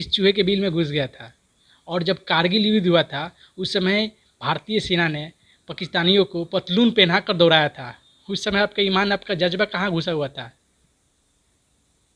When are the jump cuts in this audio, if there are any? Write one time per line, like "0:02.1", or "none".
none